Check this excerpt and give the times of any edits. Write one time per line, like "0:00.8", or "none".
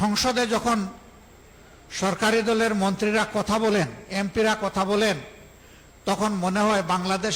none